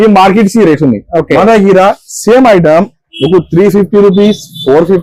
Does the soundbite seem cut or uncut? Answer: uncut